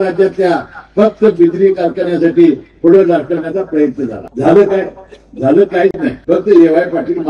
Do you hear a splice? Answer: yes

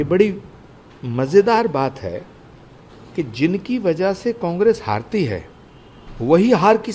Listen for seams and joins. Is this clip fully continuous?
yes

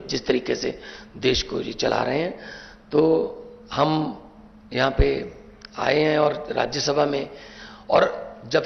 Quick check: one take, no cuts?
yes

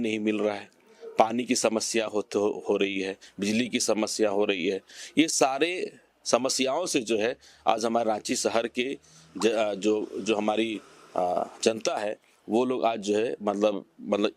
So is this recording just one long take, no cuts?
yes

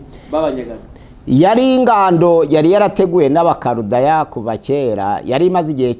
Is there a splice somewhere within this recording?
no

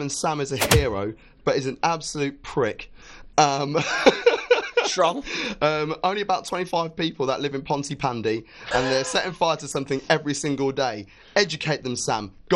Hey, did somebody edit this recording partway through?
no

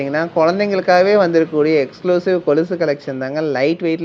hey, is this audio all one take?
yes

